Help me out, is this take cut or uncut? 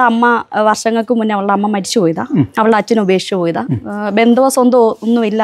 uncut